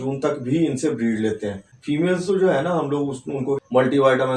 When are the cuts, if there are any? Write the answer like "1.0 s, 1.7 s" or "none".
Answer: 1.7 s